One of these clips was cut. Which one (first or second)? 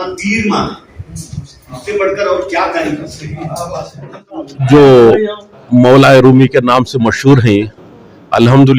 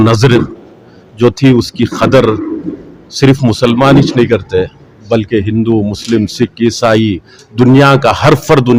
first